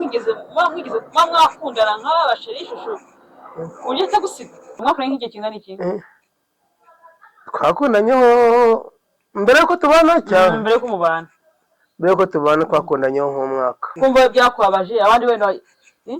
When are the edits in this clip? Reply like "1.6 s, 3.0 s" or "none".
4.8 s, 13.8 s